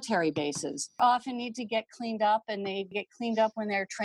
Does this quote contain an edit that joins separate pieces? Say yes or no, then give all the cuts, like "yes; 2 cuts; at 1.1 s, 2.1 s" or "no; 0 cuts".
yes; 1 cut; at 1.0 s